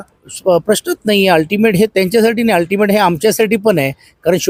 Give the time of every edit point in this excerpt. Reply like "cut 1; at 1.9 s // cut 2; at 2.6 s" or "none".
none